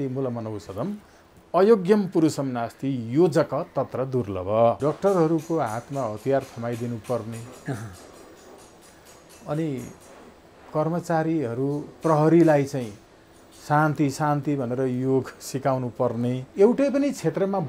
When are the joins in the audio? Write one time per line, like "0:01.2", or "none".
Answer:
0:04.8
0:16.5